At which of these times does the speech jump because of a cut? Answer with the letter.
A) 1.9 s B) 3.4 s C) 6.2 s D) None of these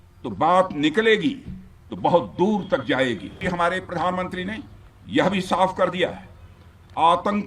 B